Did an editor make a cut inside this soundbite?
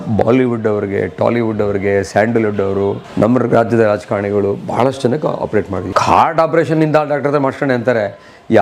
yes; 2 cuts; at 3.0 s, 5.8 s

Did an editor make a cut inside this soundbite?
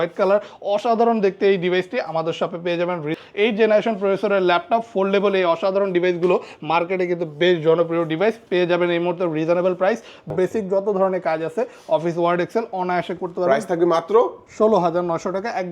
yes; 2 cuts; at 3.2 s, 10.2 s

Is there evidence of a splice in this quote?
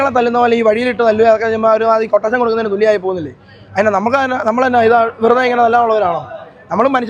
no; 0 cuts

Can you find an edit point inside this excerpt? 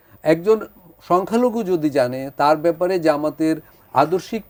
no; 0 cuts

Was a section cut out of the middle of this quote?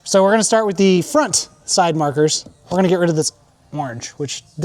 no; 0 cuts

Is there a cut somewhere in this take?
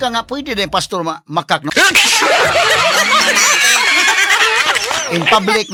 no; 0 cuts

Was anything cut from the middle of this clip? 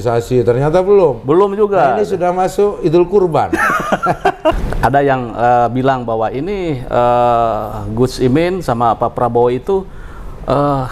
yes; 1 cut; at 4.6 s

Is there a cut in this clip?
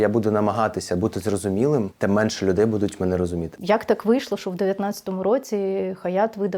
yes; 2 cuts; at 1.9 s, 3.5 s

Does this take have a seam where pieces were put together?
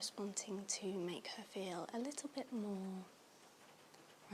no; 0 cuts

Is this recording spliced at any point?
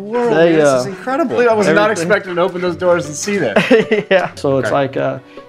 yes; 2 cuts; at 1.4 s, 4.4 s

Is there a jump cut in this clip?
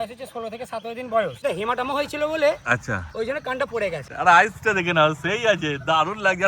yes; 2 cuts; at 1.4 s, 4.1 s

